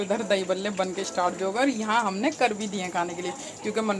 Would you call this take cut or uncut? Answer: uncut